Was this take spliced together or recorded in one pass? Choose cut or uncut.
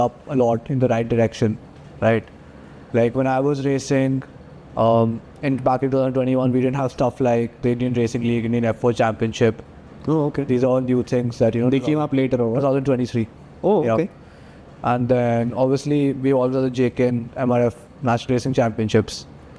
uncut